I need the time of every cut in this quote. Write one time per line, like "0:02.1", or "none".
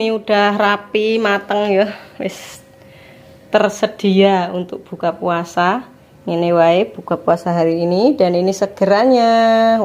none